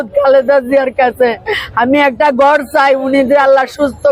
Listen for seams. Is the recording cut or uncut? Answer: uncut